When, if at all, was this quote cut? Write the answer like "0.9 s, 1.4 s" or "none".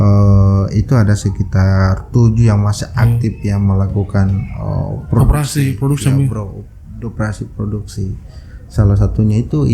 none